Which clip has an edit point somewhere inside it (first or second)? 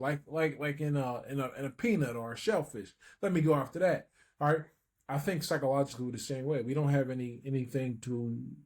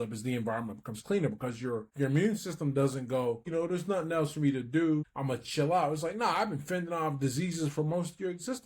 second